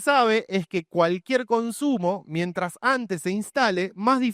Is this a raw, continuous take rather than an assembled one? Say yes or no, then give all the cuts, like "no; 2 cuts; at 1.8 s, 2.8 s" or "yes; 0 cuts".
yes; 0 cuts